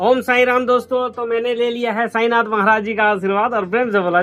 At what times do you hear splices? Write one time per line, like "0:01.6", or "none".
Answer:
none